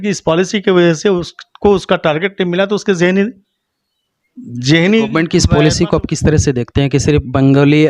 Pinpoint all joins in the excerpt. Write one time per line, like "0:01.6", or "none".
0:05.1